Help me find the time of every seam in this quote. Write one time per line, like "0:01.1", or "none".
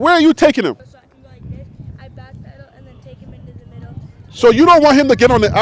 none